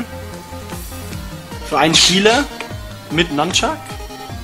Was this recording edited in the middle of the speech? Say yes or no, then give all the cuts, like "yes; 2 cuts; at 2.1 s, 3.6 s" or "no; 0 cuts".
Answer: yes; 1 cut; at 2.1 s